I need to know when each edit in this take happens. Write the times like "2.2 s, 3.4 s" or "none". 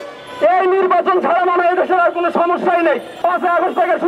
3.1 s